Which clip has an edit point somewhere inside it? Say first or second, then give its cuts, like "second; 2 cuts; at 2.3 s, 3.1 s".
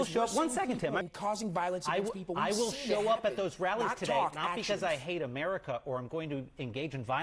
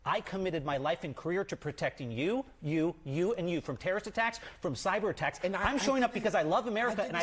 first; 1 cut; at 1.0 s